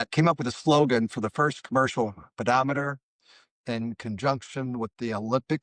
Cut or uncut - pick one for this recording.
uncut